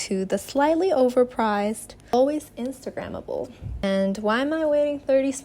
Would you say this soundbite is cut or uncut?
cut